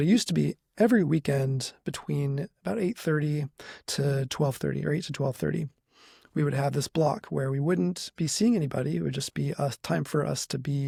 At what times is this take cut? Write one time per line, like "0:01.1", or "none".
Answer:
none